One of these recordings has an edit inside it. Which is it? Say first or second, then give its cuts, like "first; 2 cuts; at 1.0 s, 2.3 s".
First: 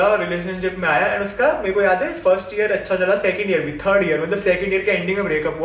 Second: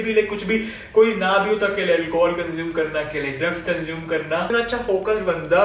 second; 1 cut; at 4.5 s